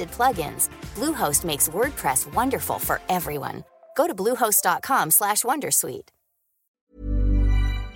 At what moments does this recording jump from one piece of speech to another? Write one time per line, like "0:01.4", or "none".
0:06.8